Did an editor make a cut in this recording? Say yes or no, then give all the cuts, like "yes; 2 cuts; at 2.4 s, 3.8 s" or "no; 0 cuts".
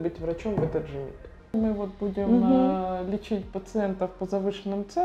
yes; 1 cut; at 1.5 s